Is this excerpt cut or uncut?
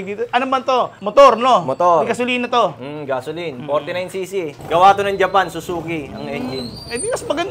cut